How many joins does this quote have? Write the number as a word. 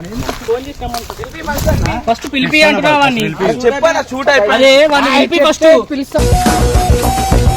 zero